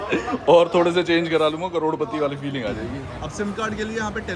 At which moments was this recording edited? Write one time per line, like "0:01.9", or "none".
0:03.0